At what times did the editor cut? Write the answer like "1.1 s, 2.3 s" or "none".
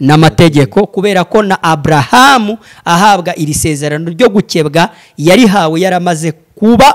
none